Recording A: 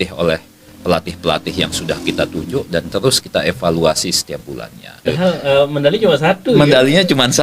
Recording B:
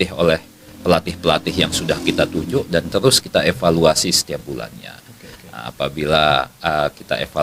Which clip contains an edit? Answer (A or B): A